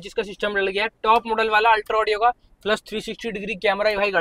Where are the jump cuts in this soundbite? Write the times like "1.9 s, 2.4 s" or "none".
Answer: none